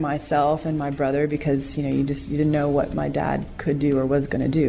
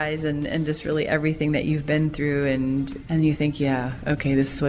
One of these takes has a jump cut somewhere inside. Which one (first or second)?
second